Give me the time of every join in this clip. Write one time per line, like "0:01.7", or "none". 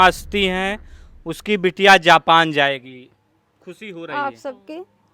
none